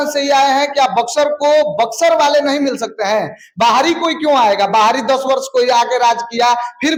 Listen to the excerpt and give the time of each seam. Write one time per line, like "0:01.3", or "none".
none